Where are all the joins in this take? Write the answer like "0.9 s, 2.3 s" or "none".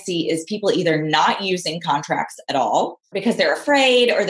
3.2 s